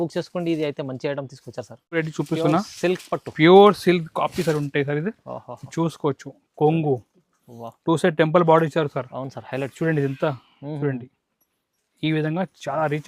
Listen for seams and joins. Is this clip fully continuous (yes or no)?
no